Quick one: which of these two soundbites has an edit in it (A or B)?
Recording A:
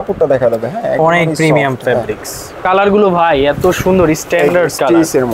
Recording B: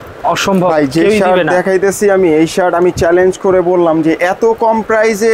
A